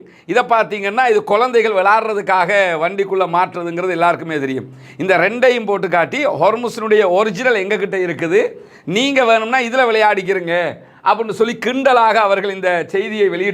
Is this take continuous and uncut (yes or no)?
yes